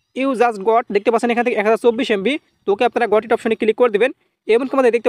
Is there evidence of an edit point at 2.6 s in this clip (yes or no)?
no